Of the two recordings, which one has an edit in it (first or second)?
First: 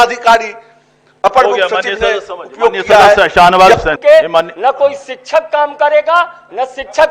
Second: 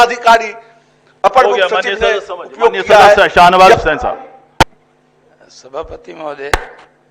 first